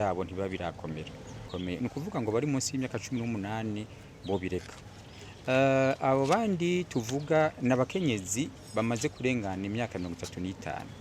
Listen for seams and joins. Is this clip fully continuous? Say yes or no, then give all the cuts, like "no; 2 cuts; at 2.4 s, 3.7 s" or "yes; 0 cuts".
no; 1 cut; at 1.4 s